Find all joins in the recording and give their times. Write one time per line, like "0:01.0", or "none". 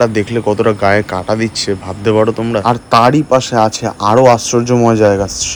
none